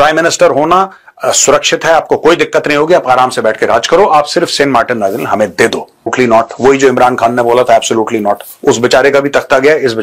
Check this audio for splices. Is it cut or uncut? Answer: cut